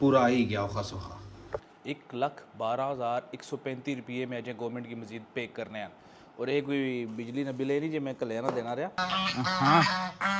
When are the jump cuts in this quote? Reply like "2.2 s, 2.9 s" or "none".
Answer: 1.7 s, 9.0 s